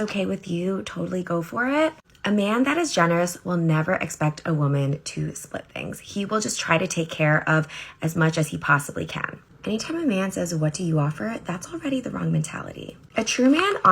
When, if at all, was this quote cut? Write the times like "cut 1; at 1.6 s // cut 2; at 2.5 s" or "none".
cut 1; at 3.9 s